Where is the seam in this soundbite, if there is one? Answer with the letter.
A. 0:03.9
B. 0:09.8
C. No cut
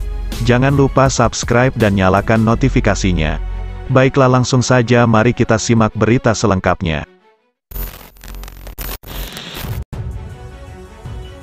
B